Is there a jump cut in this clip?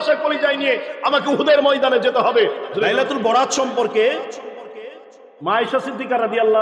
yes; 1 cut; at 2.7 s

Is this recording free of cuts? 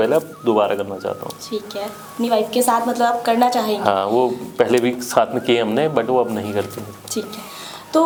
yes; 0 cuts

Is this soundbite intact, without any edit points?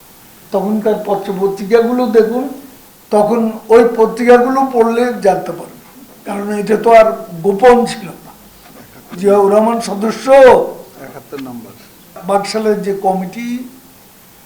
no; 1 cut; at 12.2 s

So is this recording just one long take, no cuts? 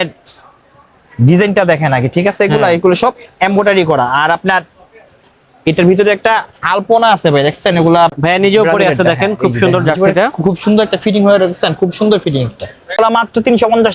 no; 2 cuts; at 8.1 s, 13.0 s

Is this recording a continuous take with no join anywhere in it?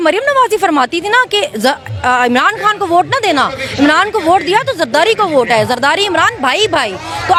yes; 0 cuts

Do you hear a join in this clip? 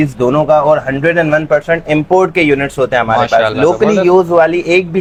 no; 0 cuts

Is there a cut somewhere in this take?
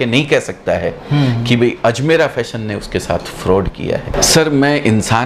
yes; 1 cut; at 4.1 s

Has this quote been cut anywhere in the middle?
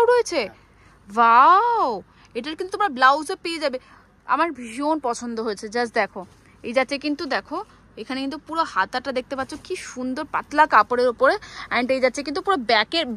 no; 0 cuts

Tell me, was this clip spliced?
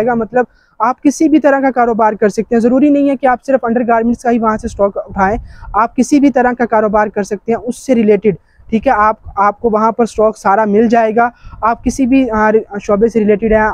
no; 0 cuts

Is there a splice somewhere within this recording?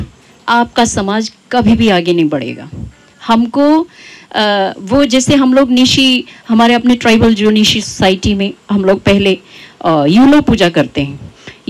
no; 0 cuts

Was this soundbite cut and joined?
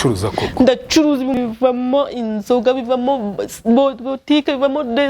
yes; 1 cut; at 1.3 s

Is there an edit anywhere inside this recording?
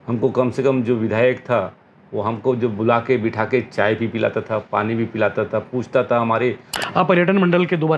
yes; 1 cut; at 6.7 s

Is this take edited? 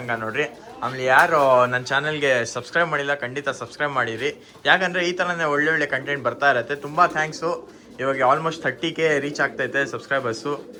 no; 0 cuts

